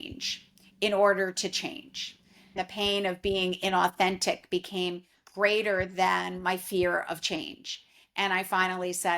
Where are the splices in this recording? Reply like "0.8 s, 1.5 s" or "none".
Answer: 2.5 s